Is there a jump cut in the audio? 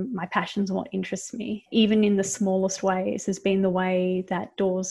no; 0 cuts

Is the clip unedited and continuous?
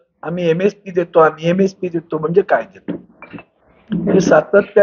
yes; 0 cuts

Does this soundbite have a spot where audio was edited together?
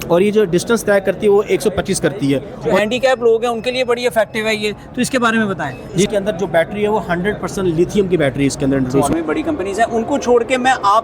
yes; 3 cuts; at 2.8 s, 6.1 s, 9.1 s

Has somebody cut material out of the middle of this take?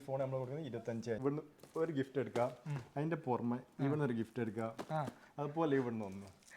yes; 1 cut; at 1.2 s

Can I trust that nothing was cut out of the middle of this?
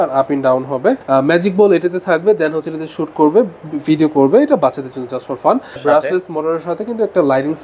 no; 2 cuts; at 1.0 s, 5.8 s

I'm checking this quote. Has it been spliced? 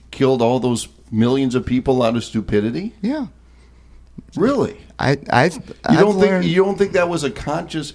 no; 0 cuts

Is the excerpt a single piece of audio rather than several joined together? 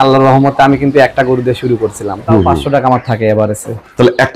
no; 1 cut; at 2.6 s

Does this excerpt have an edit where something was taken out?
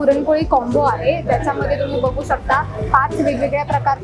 no; 0 cuts

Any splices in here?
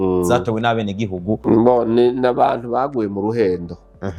yes; 1 cut; at 1.4 s

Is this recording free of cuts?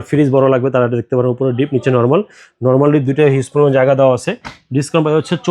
yes; 0 cuts

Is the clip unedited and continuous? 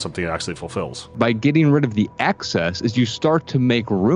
no; 1 cut; at 1.1 s

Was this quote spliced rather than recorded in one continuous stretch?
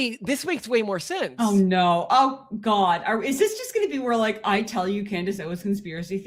no; 0 cuts

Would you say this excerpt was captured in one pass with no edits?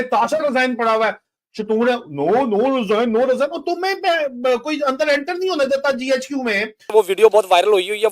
no; 1 cut; at 6.9 s

